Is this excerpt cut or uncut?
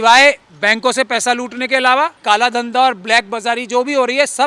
cut